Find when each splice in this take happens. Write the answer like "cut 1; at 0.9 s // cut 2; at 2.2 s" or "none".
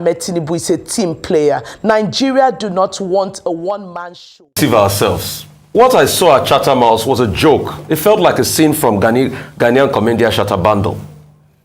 cut 1; at 4.5 s